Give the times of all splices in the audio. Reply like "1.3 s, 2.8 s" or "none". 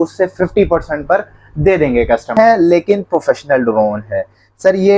2.4 s